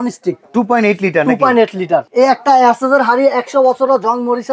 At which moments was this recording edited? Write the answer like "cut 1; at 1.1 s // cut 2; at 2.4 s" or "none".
cut 1; at 2.1 s